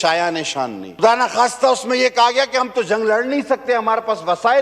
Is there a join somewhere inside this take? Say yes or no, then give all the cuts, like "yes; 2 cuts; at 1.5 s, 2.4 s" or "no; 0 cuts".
yes; 1 cut; at 1.0 s